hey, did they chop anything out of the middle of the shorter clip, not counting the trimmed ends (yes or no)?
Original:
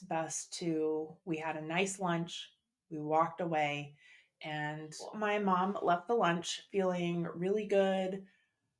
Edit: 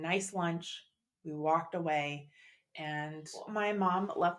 no